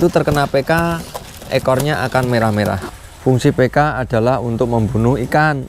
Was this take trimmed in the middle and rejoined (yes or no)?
yes